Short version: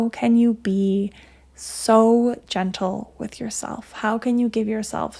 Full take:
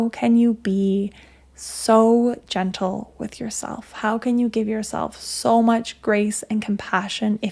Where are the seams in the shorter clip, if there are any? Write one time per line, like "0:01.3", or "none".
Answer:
none